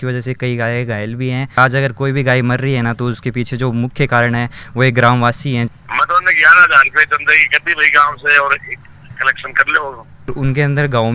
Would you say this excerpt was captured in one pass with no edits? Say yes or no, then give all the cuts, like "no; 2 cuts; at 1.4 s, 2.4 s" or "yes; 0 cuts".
no; 3 cuts; at 1.6 s, 5.7 s, 10.3 s